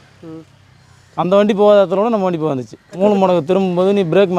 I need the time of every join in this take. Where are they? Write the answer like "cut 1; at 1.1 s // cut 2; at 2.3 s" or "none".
cut 1; at 2.9 s